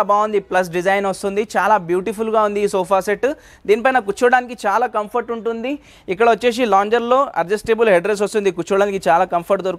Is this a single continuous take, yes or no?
yes